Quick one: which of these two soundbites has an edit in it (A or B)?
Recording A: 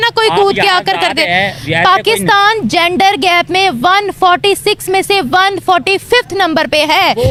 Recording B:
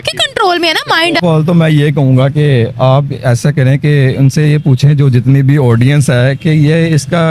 B